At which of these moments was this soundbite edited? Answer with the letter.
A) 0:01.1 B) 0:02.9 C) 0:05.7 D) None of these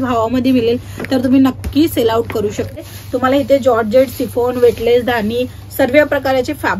B